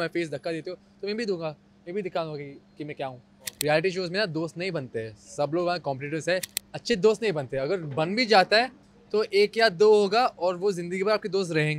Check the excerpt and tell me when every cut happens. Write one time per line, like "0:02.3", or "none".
0:03.5
0:06.6